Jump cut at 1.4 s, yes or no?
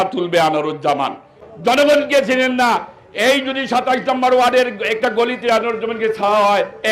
yes